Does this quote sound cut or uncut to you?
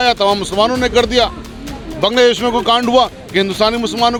uncut